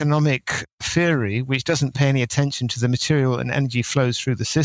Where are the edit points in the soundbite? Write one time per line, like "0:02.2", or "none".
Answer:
none